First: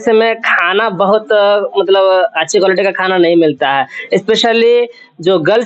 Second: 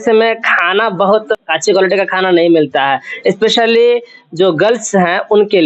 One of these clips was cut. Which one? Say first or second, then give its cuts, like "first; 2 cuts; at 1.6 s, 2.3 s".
second; 1 cut; at 1.4 s